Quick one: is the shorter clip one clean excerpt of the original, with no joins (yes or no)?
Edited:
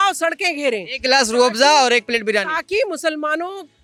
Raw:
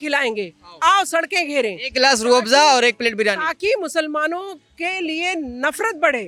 yes